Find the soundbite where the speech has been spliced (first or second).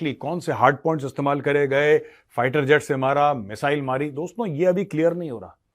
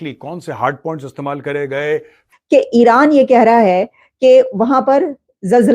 second